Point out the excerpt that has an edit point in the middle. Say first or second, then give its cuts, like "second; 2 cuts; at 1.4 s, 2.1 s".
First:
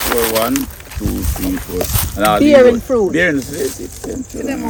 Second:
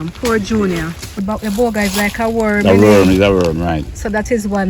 second; 1 cut; at 1.1 s